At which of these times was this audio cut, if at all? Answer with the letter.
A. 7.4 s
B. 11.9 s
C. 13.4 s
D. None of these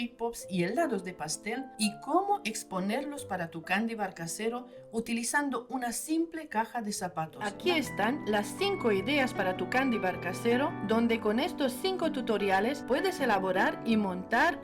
A